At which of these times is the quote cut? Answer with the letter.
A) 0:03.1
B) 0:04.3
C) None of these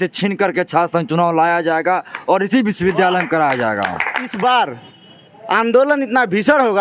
B